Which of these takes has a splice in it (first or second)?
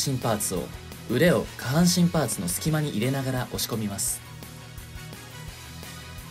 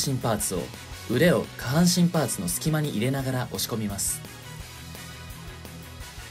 first